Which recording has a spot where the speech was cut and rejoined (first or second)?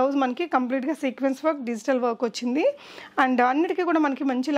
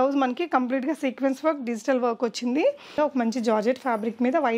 second